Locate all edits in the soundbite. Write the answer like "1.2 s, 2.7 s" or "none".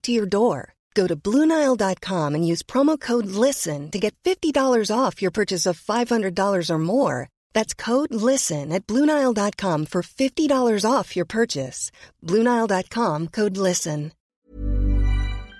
14.3 s